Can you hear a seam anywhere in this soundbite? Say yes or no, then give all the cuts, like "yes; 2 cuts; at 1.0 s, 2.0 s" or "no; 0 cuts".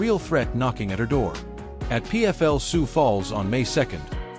yes; 1 cut; at 2.4 s